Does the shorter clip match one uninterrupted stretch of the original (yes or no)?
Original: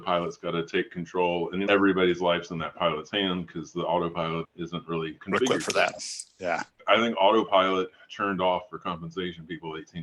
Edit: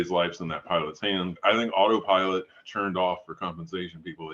no